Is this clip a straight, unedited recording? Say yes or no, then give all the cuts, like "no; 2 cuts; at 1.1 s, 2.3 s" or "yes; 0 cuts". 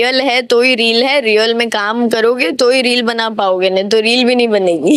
yes; 0 cuts